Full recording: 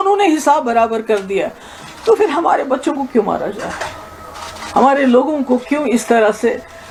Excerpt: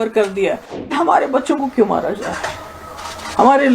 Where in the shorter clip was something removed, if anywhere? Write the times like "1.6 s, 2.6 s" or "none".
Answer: 0.9 s

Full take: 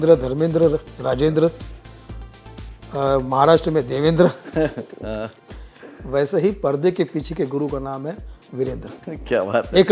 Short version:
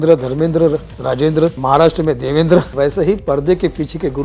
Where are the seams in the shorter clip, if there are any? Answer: 1.6 s, 2.7 s

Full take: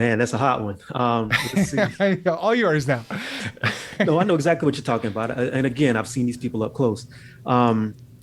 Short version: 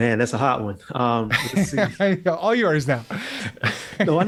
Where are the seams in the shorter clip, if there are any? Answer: none

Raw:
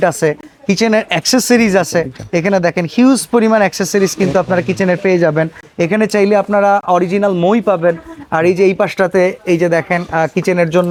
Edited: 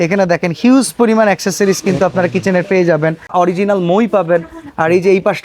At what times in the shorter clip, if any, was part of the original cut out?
3.3 s

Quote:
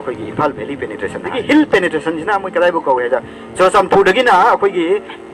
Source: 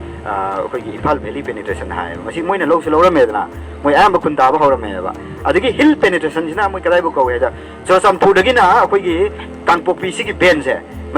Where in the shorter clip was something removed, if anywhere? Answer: 1.4 s

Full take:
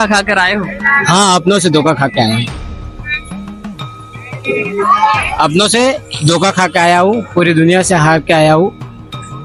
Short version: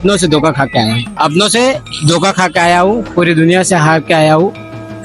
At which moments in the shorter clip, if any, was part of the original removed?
1.1 s

